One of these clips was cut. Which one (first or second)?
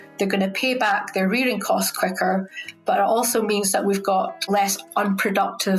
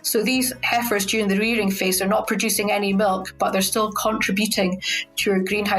first